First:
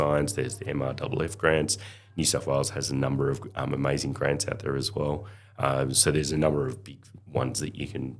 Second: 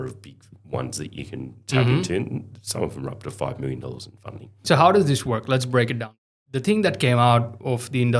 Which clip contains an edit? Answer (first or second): second